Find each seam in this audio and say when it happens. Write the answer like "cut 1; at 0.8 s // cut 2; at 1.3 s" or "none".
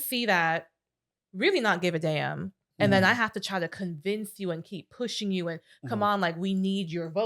none